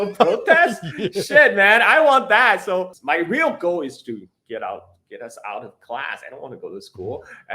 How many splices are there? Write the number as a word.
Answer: one